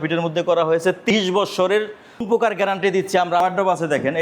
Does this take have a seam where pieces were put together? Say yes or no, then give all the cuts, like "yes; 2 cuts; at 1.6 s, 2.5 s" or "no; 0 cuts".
yes; 3 cuts; at 1.1 s, 2.2 s, 3.4 s